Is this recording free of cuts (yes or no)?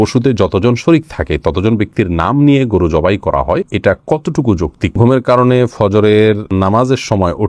no